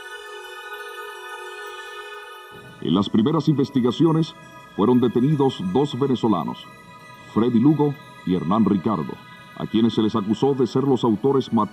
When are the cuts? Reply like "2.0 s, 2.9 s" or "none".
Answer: 1.5 s